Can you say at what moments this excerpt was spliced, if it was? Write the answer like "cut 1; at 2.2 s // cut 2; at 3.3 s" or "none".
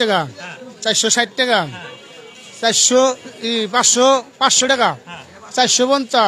none